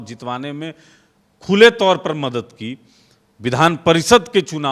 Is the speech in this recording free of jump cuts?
yes; 0 cuts

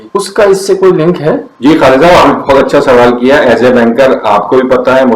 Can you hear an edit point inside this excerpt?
no; 0 cuts

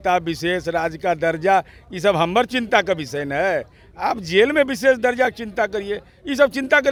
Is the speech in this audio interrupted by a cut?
no; 0 cuts

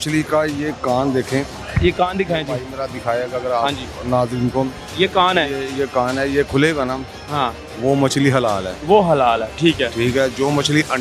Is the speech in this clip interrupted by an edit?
no; 0 cuts

